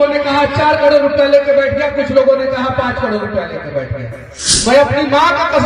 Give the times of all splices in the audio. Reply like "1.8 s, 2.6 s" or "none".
4.7 s